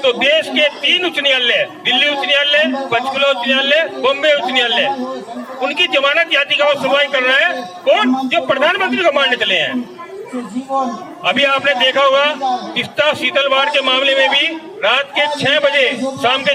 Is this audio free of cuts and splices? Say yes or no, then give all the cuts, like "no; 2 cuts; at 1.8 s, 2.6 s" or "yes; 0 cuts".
yes; 0 cuts